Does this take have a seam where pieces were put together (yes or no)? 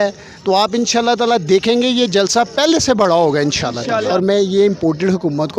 yes